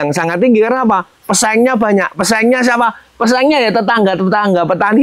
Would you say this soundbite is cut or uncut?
uncut